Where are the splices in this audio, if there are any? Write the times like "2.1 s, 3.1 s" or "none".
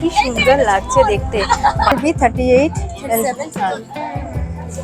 1.9 s

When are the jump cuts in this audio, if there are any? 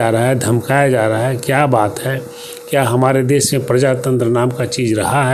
none

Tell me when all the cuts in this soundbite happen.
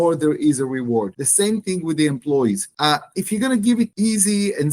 1.2 s, 2.7 s, 3.9 s

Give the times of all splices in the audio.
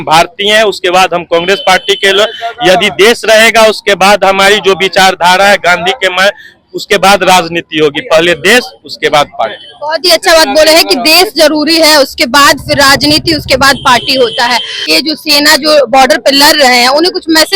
14.9 s

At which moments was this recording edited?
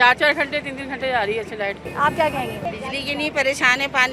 none

